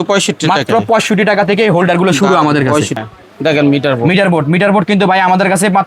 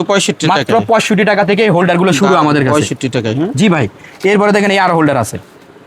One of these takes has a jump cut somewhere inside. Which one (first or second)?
first